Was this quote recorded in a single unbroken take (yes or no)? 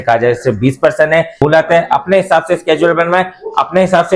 no